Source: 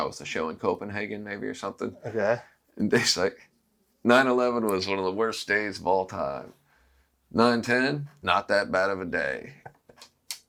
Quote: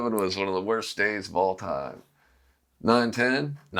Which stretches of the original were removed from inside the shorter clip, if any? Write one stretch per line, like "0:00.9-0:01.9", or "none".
none